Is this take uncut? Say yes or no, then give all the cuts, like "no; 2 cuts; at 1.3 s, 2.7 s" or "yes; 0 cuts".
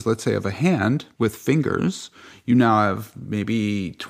no; 1 cut; at 1.1 s